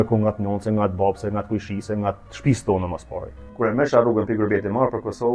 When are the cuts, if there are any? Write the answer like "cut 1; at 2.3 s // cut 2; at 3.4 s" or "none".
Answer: cut 1; at 3.4 s